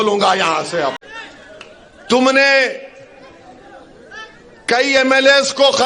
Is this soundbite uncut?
no; 1 cut; at 1.0 s

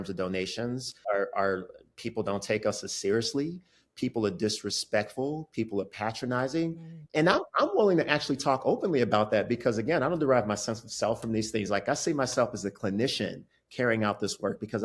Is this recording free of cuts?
yes; 0 cuts

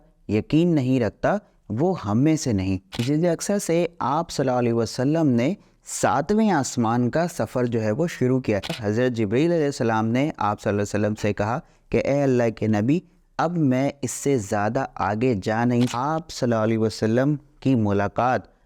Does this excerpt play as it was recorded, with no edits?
no; 3 cuts; at 3.0 s, 8.8 s, 15.9 s

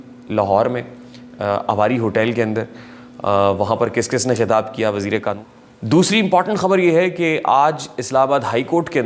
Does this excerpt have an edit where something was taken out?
yes; 1 cut; at 5.4 s

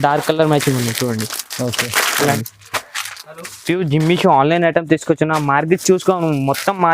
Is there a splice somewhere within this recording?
yes; 1 cut; at 2.4 s

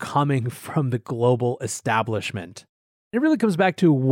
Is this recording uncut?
no; 1 cut; at 3.1 s

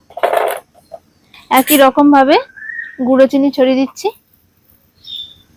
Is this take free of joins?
yes; 0 cuts

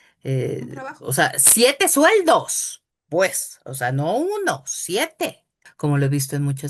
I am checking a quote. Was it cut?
yes; 1 cut; at 5.6 s

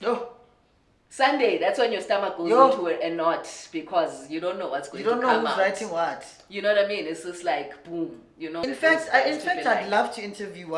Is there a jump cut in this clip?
yes; 1 cut; at 8.6 s

